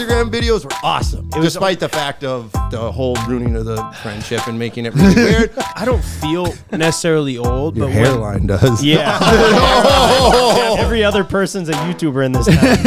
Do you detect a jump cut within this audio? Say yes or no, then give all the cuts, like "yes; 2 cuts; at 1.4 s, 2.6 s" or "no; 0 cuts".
yes; 4 cuts; at 1.2 s, 2.6 s, 5.6 s, 10.8 s